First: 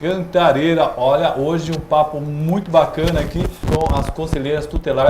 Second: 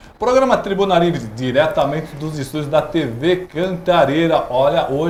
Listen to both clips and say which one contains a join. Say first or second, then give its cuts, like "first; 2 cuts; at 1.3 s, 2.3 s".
first; 1 cut; at 3.6 s